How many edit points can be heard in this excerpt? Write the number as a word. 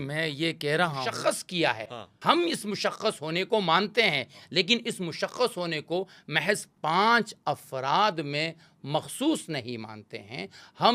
one